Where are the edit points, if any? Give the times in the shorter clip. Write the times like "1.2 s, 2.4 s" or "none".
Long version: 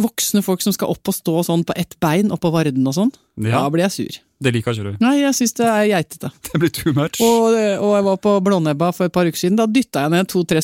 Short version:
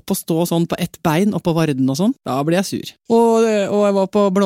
2.6 s